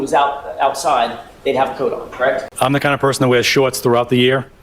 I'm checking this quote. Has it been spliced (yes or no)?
yes